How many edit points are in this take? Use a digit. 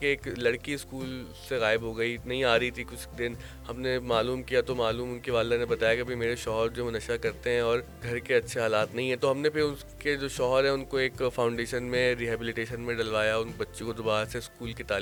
0